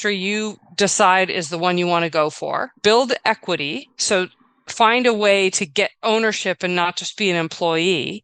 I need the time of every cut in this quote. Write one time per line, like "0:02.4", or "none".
0:02.7